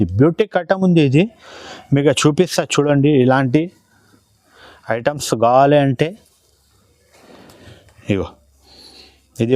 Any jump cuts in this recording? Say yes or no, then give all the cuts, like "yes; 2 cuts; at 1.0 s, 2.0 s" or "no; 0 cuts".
no; 0 cuts